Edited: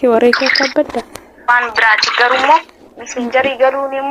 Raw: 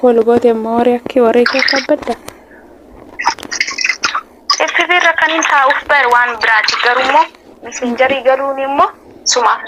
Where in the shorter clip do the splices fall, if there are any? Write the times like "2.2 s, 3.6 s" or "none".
1.5 s